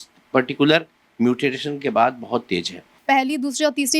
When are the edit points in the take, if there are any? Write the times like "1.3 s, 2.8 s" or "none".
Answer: 2.9 s